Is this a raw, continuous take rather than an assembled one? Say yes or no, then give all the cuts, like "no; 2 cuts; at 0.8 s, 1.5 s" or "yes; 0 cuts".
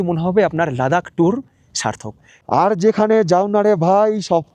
no; 1 cut; at 2.3 s